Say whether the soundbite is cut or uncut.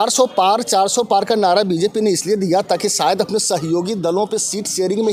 uncut